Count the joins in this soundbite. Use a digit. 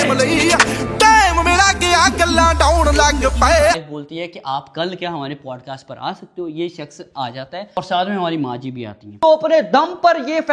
2